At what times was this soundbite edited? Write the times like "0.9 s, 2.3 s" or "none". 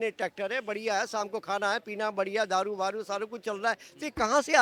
none